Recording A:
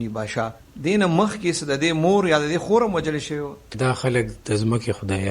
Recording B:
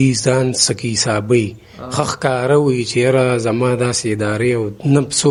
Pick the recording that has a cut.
A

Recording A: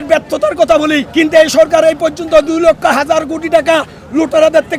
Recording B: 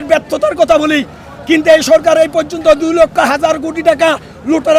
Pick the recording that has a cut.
A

